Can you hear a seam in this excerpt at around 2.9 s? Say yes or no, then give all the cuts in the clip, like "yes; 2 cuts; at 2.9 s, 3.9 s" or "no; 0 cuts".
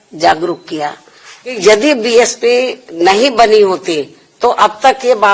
no; 1 cut; at 1.6 s